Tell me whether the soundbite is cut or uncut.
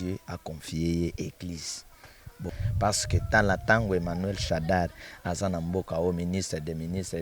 cut